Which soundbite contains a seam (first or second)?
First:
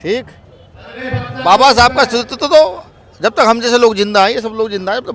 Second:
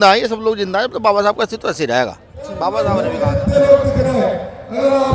second